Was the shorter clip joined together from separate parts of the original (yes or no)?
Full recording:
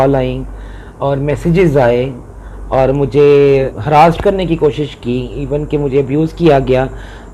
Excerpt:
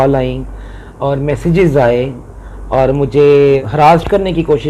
yes